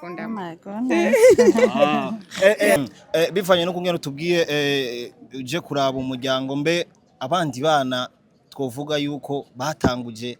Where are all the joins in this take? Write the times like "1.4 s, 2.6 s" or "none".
2.8 s